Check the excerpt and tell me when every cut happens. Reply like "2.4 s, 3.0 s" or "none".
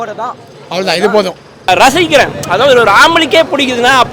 1.7 s